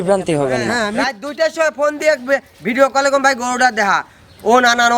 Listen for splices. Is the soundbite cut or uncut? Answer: cut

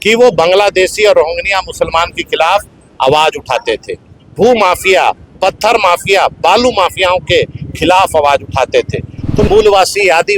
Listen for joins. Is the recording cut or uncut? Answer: cut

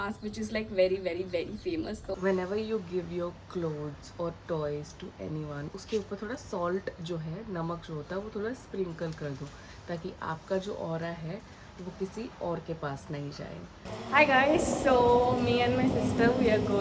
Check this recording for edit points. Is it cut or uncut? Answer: cut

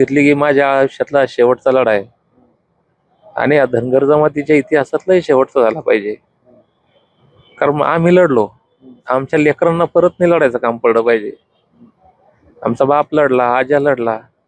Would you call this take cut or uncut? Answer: uncut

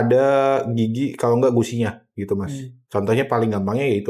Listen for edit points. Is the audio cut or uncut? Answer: uncut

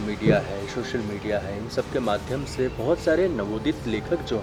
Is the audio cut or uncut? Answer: uncut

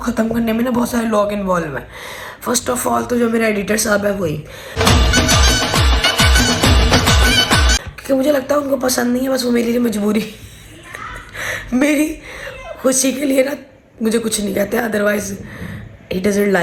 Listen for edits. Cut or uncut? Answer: uncut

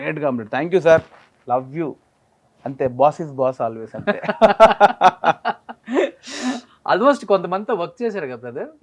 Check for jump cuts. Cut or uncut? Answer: uncut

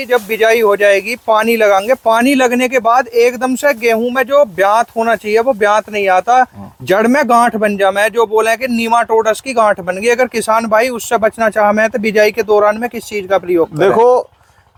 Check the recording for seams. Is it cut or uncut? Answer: uncut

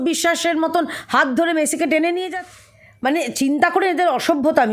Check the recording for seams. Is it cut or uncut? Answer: cut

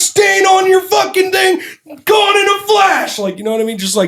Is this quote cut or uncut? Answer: uncut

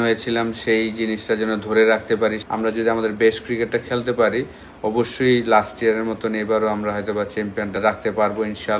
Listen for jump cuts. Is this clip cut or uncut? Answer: cut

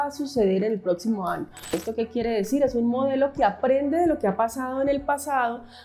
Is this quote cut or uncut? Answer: cut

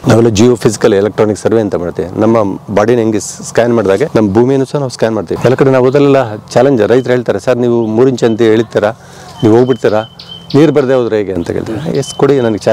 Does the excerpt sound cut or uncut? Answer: cut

